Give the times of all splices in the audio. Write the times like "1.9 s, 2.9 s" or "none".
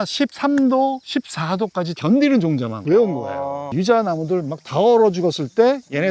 2.0 s, 3.6 s